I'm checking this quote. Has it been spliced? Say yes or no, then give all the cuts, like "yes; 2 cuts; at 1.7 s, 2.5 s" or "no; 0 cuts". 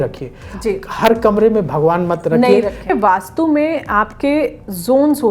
yes; 1 cut; at 2.9 s